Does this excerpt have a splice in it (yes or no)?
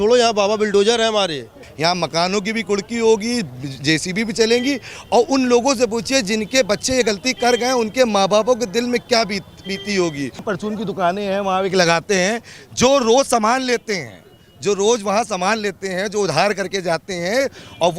yes